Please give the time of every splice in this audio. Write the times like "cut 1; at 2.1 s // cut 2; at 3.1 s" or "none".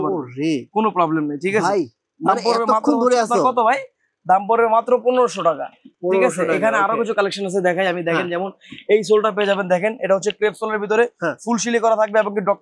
none